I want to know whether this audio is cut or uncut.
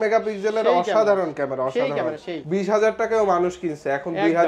cut